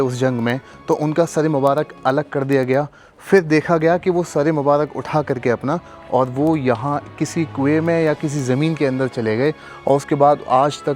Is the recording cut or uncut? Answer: uncut